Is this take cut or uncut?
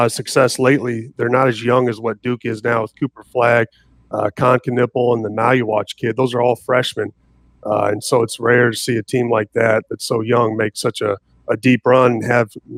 uncut